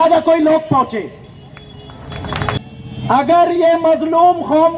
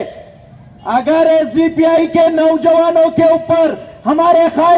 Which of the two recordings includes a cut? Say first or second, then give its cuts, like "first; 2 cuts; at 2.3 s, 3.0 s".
first; 1 cut; at 2.5 s